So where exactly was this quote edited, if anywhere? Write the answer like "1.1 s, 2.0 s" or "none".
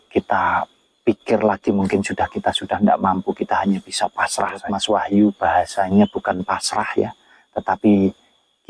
4.7 s